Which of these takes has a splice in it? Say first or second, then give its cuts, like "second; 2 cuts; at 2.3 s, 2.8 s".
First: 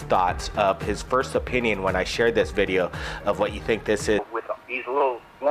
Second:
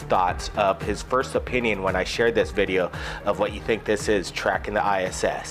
second; 1 cut; at 4.3 s